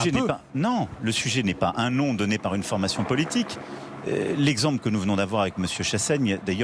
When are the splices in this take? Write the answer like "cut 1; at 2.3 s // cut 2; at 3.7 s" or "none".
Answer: cut 1; at 0.9 s